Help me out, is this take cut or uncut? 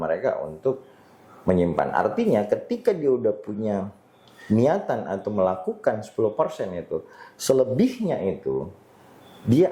uncut